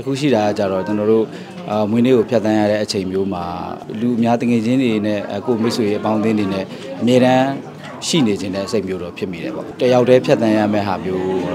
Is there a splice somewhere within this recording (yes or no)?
yes